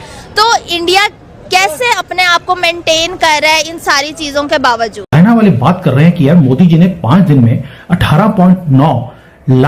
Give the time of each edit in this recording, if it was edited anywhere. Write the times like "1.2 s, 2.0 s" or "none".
5.1 s